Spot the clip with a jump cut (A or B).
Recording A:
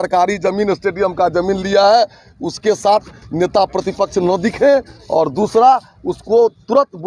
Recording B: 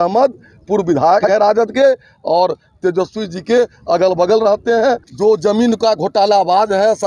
B